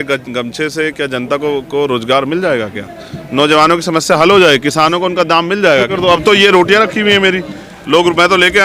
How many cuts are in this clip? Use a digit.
1